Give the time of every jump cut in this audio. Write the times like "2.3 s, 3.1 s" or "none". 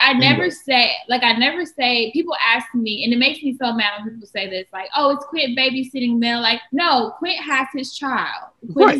none

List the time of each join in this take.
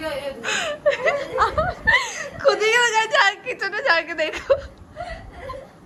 none

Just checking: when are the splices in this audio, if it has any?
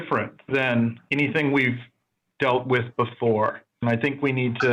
1.0 s, 3.8 s

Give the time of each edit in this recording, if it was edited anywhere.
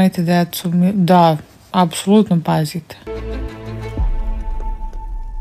3.1 s

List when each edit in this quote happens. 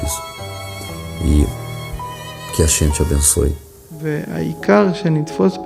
4.0 s

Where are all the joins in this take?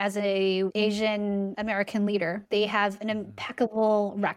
1.0 s, 2.4 s

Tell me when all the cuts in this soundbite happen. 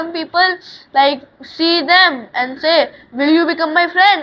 none

